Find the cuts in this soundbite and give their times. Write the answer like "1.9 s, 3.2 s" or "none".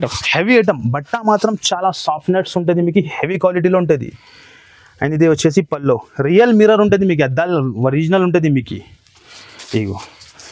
none